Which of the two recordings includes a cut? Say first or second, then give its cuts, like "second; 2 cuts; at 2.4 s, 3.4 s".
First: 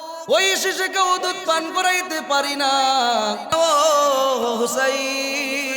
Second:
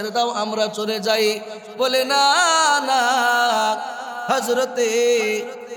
first; 1 cut; at 3.5 s